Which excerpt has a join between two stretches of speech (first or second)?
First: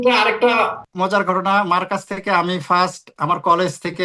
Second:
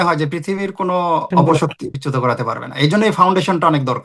second